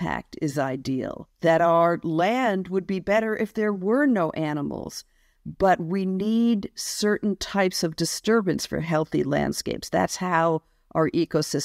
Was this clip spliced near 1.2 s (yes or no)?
yes